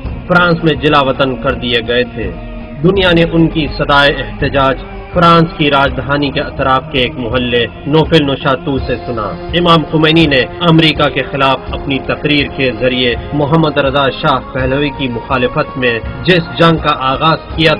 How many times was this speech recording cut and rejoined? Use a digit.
1